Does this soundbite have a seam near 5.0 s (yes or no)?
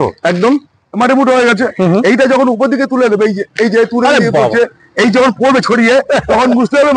no